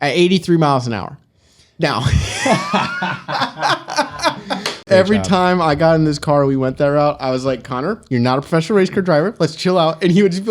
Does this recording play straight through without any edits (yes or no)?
no